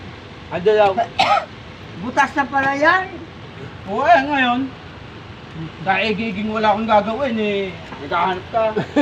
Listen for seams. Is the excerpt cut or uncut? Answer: uncut